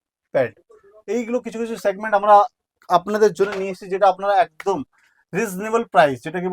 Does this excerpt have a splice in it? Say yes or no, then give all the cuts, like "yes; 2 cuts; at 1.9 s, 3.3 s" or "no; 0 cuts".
no; 0 cuts